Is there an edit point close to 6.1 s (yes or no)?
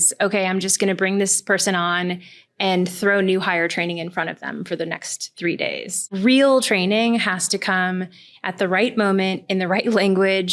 yes